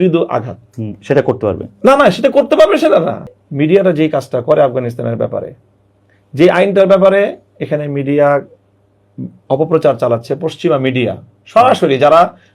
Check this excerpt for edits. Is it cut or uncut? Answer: cut